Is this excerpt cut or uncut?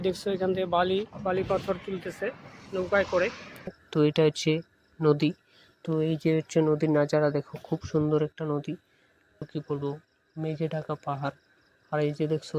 cut